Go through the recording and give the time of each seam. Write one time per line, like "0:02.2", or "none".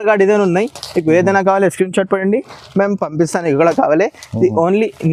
none